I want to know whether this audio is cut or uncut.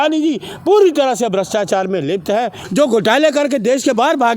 cut